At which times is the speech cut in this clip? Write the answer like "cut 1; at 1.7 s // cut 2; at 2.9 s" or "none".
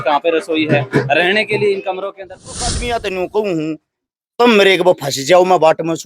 cut 1; at 2.6 s